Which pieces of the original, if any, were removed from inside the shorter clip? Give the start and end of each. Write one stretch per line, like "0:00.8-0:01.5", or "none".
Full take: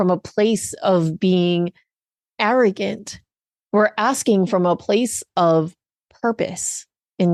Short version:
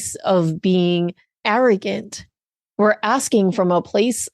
0:01.8-0:02.2